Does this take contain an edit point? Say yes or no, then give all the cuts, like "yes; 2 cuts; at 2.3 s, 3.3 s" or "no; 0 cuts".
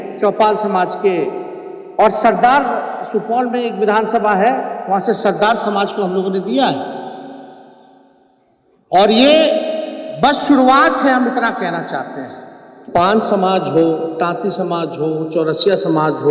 yes; 1 cut; at 12.8 s